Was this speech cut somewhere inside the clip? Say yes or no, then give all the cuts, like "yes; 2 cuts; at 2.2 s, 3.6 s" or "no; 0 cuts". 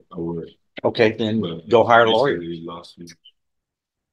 yes; 1 cut; at 2.9 s